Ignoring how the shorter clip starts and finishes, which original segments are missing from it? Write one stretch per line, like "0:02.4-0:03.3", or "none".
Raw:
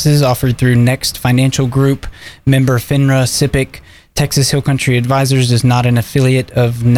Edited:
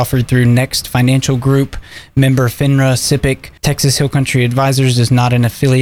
0:03.8-0:04.0